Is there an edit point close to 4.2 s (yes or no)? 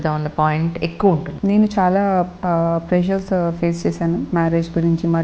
no